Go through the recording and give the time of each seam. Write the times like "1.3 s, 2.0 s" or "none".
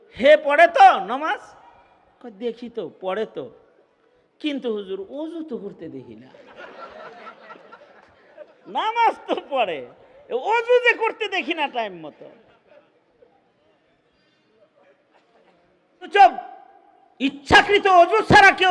16.1 s